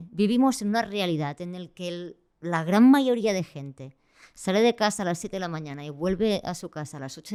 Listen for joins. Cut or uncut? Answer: uncut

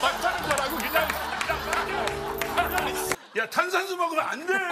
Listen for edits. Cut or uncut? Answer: cut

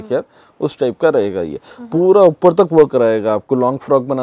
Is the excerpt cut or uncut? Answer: cut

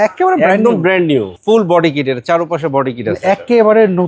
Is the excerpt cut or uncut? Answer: cut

